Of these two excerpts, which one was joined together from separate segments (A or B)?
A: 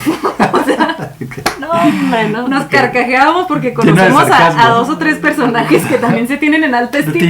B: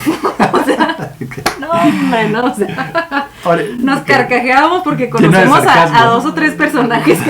A